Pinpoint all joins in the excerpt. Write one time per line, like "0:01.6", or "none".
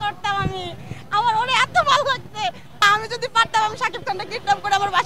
0:02.8